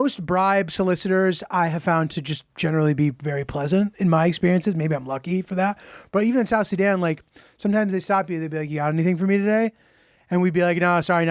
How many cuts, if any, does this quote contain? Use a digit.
0